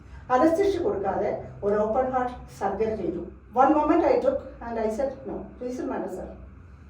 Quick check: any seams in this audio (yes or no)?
yes